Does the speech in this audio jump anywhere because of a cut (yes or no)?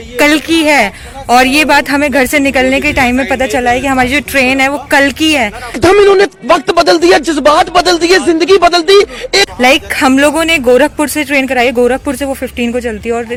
no